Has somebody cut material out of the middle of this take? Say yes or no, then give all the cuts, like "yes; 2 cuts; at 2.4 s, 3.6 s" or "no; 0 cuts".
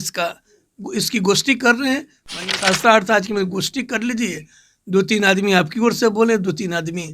yes; 1 cut; at 2.2 s